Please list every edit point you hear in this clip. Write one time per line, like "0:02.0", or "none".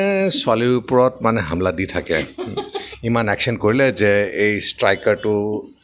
0:02.9